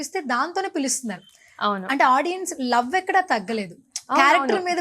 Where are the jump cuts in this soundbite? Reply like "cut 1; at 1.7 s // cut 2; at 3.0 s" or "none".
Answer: none